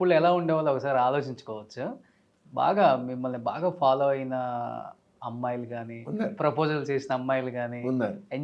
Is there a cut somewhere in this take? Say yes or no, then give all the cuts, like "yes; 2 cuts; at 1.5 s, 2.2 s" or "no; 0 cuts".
no; 0 cuts